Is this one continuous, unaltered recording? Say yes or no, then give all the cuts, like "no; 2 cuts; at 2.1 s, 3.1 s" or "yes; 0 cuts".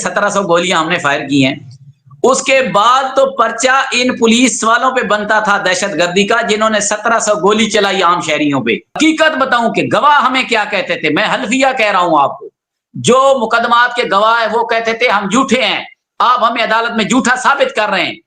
no; 1 cut; at 8.9 s